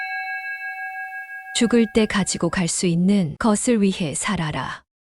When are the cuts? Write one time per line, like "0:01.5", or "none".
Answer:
0:01.5